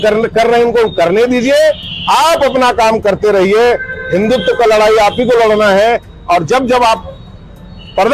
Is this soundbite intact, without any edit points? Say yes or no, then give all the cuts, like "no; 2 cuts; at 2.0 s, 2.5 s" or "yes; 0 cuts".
yes; 0 cuts